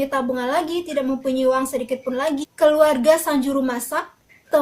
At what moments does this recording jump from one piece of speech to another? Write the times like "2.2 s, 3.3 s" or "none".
2.5 s